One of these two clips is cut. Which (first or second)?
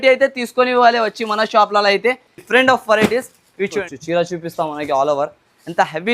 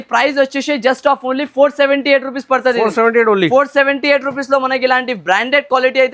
first